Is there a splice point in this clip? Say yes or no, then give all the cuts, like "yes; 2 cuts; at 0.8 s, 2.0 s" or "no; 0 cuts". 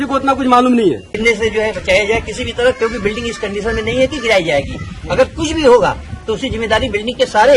yes; 1 cut; at 1.0 s